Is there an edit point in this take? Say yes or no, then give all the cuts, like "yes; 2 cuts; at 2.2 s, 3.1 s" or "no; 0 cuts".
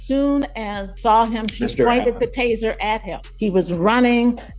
yes; 2 cuts; at 0.9 s, 3.2 s